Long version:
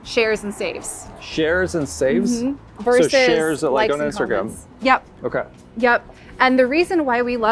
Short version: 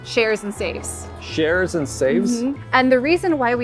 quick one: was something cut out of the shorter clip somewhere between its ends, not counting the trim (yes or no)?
yes